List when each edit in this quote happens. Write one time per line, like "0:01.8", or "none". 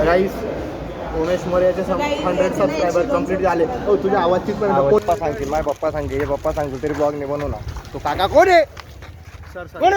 0:05.0